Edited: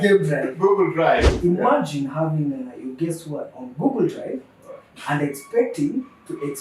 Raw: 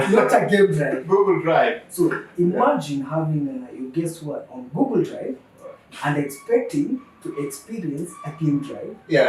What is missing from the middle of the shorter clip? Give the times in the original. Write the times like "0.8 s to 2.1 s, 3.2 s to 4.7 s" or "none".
1.8 s to 2.3 s